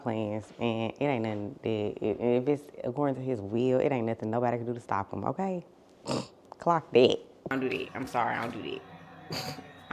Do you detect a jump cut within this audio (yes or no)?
yes